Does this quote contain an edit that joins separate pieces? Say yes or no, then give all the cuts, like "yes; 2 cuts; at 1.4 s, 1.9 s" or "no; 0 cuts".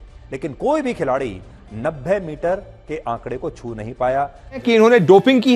yes; 1 cut; at 4.6 s